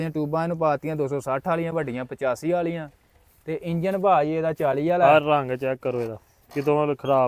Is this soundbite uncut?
yes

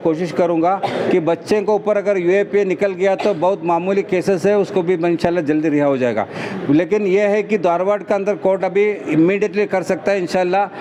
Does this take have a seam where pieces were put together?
no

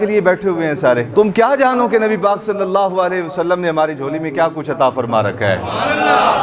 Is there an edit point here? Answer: yes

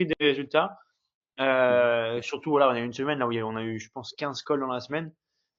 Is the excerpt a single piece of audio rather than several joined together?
yes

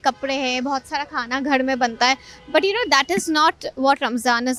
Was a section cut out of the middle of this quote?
no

